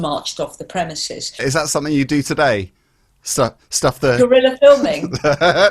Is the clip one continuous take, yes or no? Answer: no